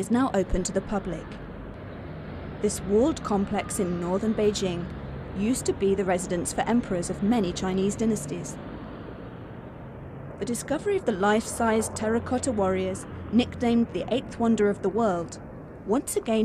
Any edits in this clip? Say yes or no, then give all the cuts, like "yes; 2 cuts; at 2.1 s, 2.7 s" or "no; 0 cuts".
yes; 1 cut; at 14.6 s